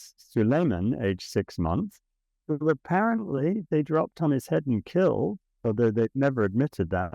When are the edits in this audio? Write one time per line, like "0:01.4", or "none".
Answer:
0:05.5